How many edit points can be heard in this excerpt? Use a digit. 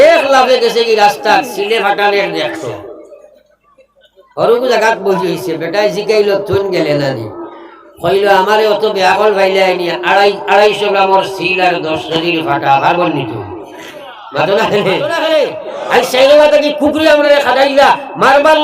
1